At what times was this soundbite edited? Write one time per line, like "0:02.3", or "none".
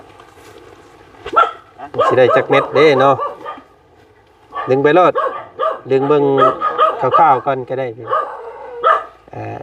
none

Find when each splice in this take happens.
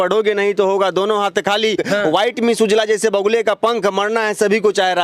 0:01.8

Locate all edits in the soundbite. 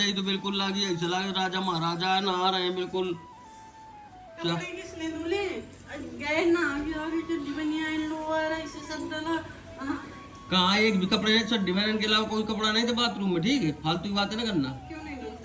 none

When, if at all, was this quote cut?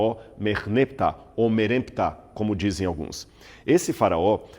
0:02.9

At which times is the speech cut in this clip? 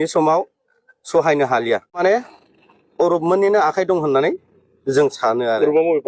0:02.0

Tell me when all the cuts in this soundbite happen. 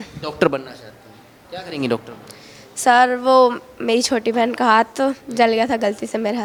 none

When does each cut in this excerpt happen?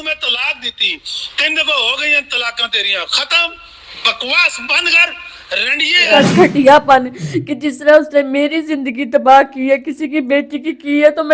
0:06.1

